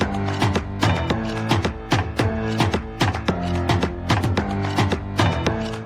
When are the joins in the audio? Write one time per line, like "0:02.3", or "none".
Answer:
none

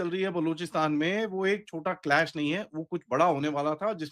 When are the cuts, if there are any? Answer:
none

